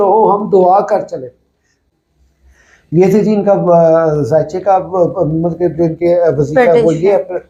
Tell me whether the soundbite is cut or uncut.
uncut